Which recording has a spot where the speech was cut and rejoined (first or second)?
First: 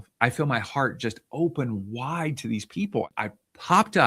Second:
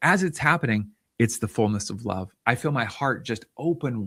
first